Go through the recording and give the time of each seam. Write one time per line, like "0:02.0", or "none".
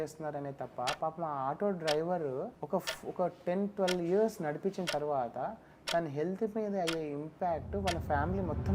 0:02.6